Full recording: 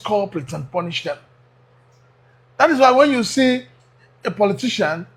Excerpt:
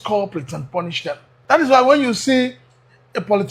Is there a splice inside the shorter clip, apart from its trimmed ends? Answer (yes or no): yes